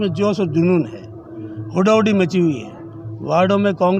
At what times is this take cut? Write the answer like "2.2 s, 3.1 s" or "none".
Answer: none